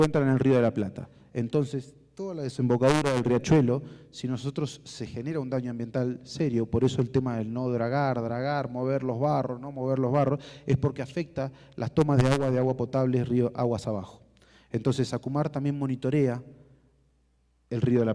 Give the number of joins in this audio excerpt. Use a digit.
1